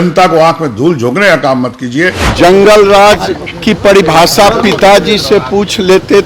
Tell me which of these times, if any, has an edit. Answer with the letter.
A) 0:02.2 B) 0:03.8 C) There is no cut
A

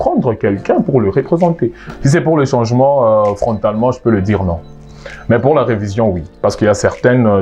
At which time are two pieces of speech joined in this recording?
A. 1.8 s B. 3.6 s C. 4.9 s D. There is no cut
A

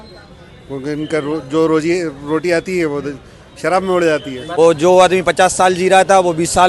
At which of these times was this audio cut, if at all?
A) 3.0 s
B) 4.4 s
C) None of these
B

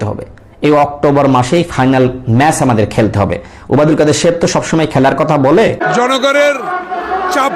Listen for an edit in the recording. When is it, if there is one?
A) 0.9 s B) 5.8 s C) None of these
B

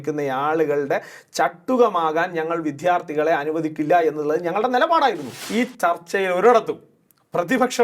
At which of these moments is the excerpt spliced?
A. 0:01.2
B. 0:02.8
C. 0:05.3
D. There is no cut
C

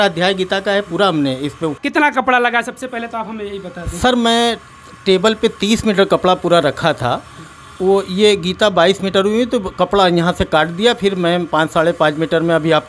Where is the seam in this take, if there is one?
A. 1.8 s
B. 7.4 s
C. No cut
A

